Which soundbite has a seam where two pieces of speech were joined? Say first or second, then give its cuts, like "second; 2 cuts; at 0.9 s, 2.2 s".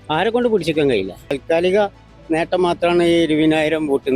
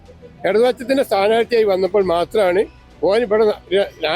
first; 1 cut; at 1.4 s